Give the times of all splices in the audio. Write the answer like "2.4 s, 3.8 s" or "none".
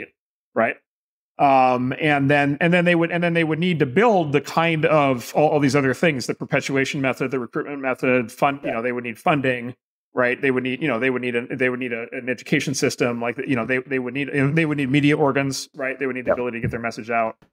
none